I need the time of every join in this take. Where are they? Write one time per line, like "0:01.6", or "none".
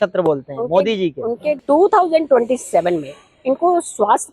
0:01.6